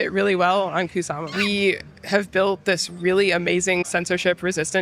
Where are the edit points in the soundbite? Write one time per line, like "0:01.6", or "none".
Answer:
0:01.3
0:03.9